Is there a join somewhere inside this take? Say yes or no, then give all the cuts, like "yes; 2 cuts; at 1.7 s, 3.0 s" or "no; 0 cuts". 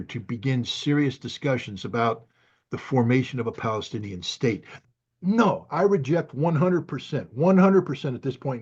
yes; 1 cut; at 4.8 s